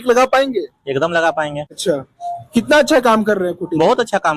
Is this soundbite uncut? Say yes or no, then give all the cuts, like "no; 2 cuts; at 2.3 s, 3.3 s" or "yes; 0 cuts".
no; 1 cut; at 1.7 s